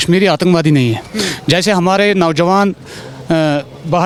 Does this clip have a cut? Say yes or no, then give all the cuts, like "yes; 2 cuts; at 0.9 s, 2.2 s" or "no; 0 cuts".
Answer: no; 0 cuts